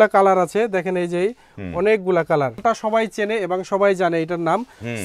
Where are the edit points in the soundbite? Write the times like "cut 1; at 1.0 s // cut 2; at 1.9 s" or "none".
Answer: cut 1; at 2.6 s